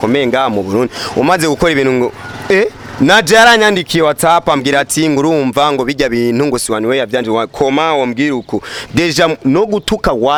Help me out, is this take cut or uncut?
uncut